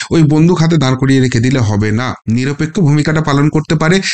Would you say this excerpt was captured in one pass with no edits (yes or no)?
no